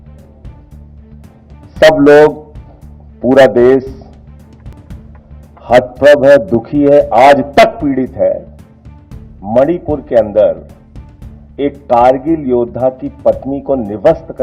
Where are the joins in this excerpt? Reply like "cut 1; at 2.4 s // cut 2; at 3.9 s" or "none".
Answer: none